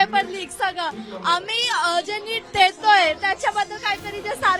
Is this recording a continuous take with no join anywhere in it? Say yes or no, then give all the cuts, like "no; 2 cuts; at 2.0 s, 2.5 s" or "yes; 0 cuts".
yes; 0 cuts